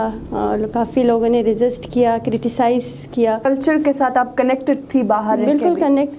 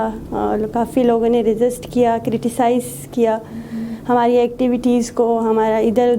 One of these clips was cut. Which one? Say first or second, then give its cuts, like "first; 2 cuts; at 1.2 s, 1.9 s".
first; 1 cut; at 3.5 s